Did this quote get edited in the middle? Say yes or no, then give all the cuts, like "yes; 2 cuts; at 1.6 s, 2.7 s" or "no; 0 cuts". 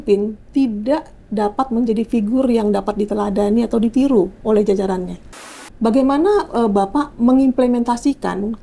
yes; 1 cut; at 5.4 s